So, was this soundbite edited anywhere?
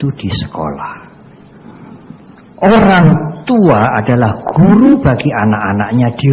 yes; 1 cut; at 2.2 s

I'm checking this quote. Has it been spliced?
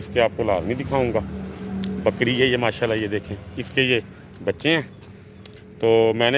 no; 0 cuts

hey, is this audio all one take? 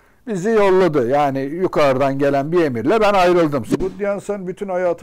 no; 1 cut; at 3.7 s

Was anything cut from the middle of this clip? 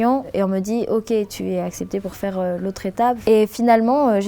yes; 2 cuts; at 1.3 s, 3.2 s

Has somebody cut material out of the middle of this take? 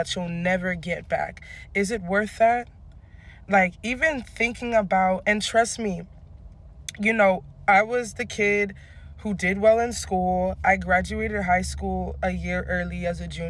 no; 0 cuts

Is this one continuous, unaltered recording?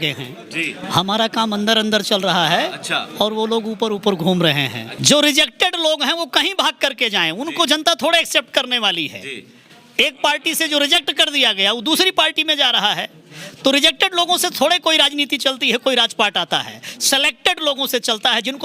no; 1 cut; at 4.9 s

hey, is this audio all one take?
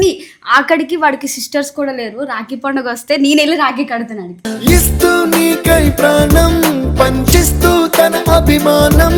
yes; 0 cuts

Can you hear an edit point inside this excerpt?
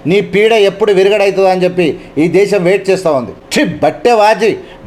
yes; 1 cut; at 3.4 s

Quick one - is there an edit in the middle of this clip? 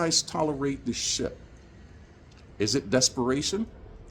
no; 0 cuts

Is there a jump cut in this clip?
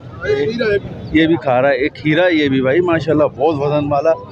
no; 0 cuts

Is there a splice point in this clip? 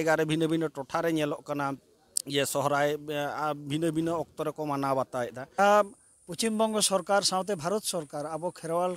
yes; 1 cut; at 5.4 s

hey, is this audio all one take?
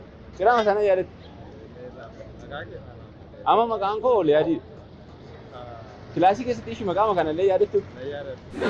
yes; 0 cuts

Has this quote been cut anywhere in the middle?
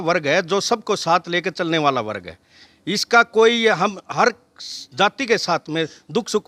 no; 0 cuts

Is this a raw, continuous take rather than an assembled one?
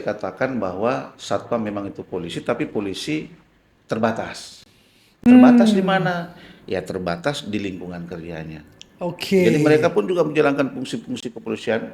yes; 0 cuts

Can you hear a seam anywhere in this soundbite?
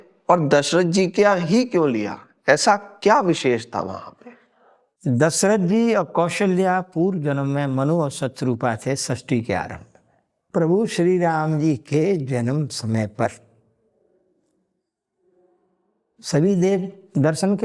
yes; 1 cut; at 10.4 s

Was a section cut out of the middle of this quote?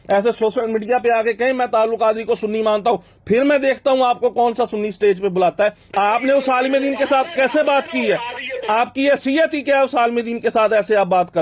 yes; 1 cut; at 5.8 s

